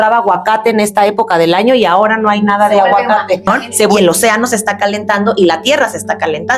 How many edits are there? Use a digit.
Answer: 1